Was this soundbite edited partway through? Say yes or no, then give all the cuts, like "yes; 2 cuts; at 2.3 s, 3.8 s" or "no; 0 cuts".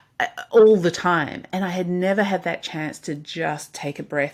no; 0 cuts